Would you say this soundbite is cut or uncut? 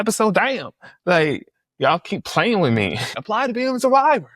cut